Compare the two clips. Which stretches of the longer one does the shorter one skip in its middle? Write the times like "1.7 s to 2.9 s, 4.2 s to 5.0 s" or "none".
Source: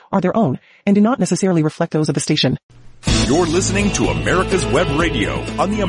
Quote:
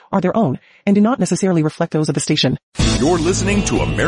2.7 s to 3.0 s